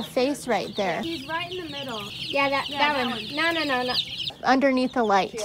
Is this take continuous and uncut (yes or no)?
no